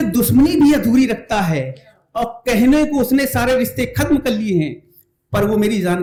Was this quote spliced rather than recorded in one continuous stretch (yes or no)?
no